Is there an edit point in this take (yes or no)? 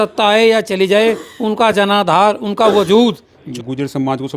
yes